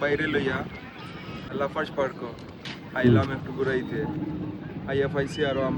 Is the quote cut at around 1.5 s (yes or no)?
yes